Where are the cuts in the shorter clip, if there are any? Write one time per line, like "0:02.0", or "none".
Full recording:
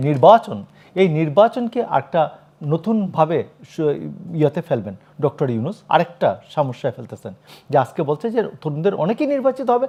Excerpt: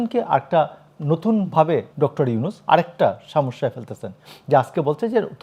0:01.9